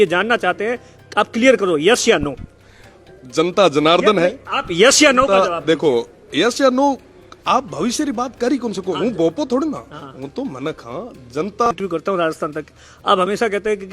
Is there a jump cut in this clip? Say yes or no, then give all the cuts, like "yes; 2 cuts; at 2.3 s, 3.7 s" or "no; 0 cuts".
yes; 1 cut; at 11.7 s